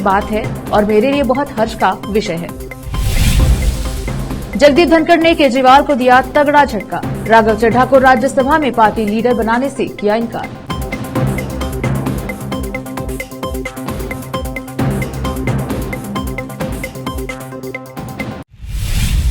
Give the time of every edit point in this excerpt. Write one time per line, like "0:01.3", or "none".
0:18.4